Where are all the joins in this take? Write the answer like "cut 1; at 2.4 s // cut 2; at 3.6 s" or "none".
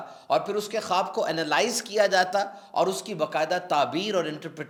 none